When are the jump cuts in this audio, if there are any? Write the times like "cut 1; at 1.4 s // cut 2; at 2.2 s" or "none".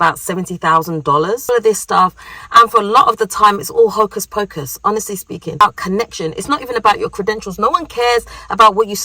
cut 1; at 1.5 s // cut 2; at 5.6 s